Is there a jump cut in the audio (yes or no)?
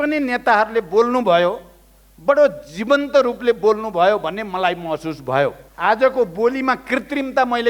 yes